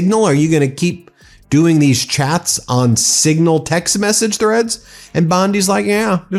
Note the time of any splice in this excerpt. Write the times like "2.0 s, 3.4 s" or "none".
none